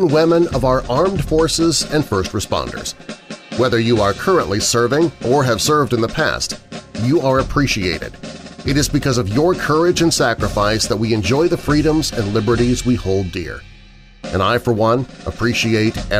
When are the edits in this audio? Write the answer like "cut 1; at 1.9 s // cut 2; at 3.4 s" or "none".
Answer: none